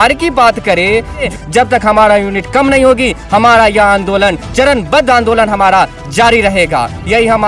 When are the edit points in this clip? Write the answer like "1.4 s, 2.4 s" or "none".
1.3 s